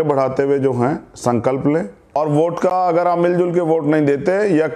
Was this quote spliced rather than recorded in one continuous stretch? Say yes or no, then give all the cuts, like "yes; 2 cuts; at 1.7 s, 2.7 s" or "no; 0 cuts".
yes; 1 cut; at 2.2 s